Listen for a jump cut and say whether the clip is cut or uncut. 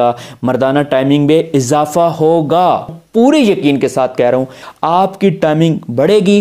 cut